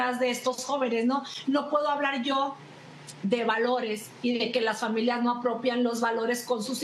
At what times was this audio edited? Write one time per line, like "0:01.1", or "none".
none